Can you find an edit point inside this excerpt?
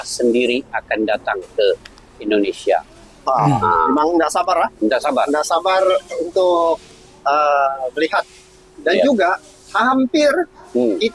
no; 0 cuts

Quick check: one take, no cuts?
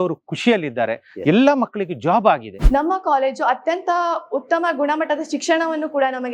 no; 1 cut; at 2.6 s

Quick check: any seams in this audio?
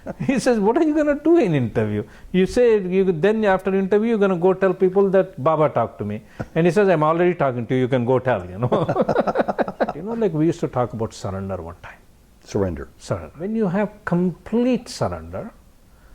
yes; 2 cuts; at 10.0 s, 13.4 s

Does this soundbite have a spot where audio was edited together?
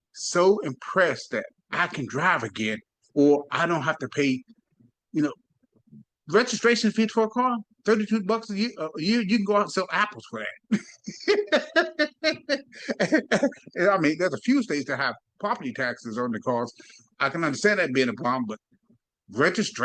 no; 0 cuts

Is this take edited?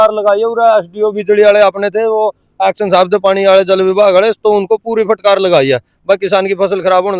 no; 0 cuts

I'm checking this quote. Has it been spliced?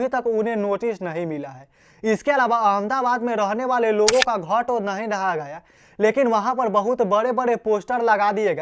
no; 0 cuts

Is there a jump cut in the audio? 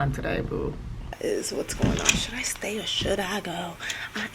yes; 1 cut; at 1.1 s

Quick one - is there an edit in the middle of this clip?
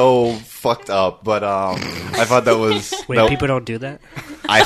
no; 0 cuts

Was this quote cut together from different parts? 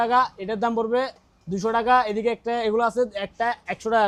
no; 0 cuts

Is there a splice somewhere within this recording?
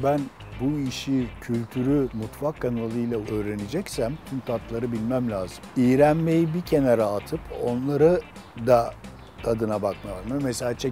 no; 0 cuts

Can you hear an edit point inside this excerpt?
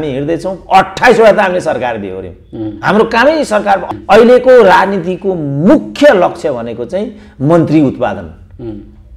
yes; 1 cut; at 3.8 s

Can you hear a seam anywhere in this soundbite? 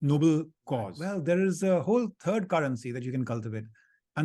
yes; 1 cut; at 1.0 s

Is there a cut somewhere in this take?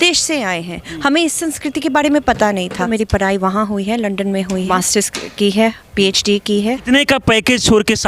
yes; 3 cuts; at 2.8 s, 4.7 s, 6.8 s

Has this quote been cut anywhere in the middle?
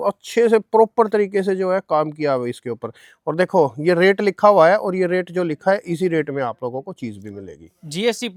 no; 0 cuts

